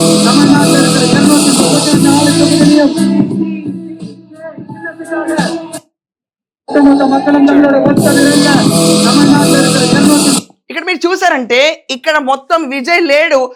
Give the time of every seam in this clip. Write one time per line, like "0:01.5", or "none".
none